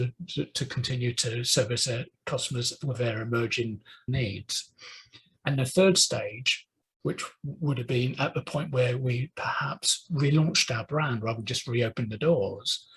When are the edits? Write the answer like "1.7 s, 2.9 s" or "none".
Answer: none